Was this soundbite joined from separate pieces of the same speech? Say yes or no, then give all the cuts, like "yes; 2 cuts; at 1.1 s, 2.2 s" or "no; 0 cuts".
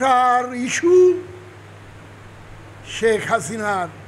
no; 0 cuts